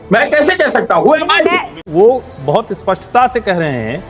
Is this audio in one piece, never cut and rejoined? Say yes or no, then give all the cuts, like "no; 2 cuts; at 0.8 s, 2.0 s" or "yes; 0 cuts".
no; 1 cut; at 1.8 s